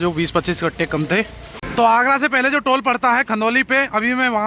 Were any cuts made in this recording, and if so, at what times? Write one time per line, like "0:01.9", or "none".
0:01.6